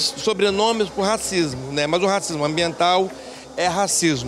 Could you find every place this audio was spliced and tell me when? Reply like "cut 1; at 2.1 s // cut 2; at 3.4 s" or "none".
none